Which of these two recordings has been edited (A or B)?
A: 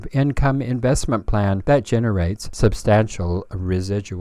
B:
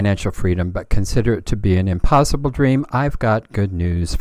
A